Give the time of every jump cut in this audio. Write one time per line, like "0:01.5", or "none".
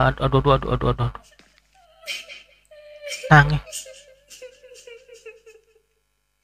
0:03.6
0:05.3